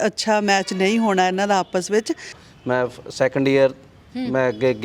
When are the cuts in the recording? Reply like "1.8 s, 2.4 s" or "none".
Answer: 2.4 s